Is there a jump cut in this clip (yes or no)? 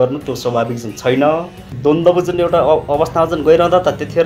yes